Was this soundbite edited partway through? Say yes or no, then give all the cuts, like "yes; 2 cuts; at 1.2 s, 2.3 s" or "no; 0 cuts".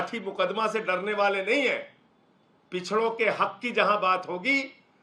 no; 0 cuts